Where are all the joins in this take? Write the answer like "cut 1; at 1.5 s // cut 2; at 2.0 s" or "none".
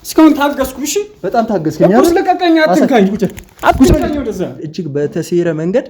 cut 1; at 4.6 s